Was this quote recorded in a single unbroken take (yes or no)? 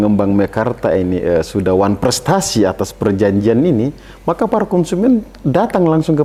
yes